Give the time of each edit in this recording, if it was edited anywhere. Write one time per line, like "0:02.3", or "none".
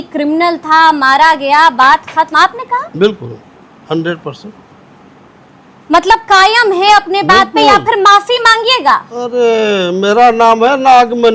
none